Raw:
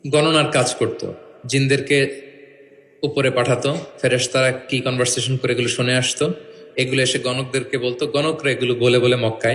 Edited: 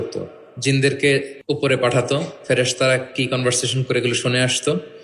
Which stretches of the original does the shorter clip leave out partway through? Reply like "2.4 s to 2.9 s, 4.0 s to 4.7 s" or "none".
2.2 s to 2.9 s